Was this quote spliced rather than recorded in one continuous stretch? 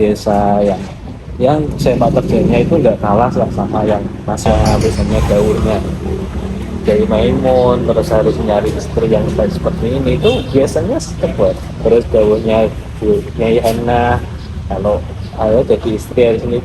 yes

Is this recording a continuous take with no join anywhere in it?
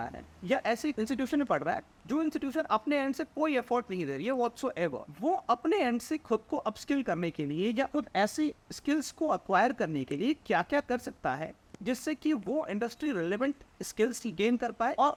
yes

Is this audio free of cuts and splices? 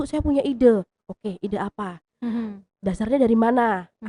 yes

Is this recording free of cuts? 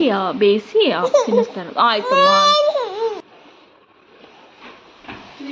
no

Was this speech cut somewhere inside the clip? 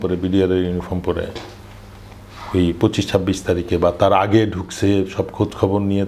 no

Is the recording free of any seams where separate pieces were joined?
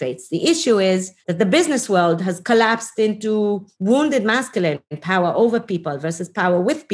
no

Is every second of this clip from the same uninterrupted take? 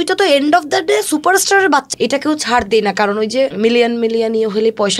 no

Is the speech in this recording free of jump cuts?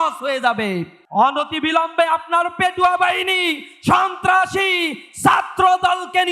no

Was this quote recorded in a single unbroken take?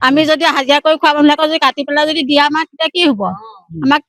yes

